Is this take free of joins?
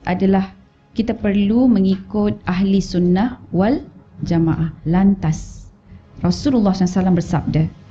no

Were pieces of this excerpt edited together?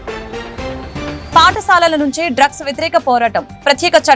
no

